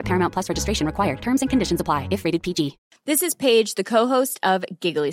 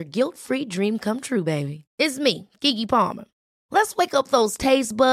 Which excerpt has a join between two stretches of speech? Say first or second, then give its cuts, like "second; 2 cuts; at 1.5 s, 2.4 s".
first; 1 cut; at 2.8 s